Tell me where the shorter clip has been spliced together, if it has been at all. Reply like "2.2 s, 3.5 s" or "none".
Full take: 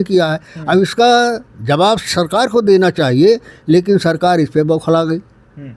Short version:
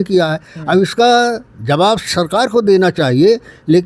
none